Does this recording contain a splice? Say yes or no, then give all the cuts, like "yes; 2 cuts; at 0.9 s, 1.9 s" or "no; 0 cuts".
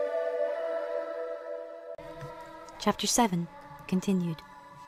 no; 0 cuts